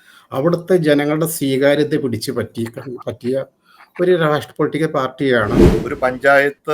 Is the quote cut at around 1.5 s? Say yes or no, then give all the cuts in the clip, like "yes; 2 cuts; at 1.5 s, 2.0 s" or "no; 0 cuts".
no; 1 cut; at 5.7 s